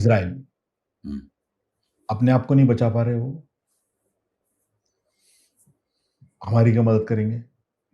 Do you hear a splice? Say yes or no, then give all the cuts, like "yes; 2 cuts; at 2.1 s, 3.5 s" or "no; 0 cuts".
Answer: no; 0 cuts